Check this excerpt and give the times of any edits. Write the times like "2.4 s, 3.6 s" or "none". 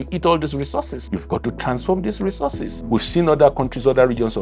1.0 s, 2.7 s